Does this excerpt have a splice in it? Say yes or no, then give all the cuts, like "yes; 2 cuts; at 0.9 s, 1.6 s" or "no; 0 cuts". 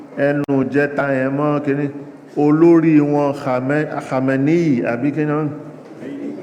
no; 0 cuts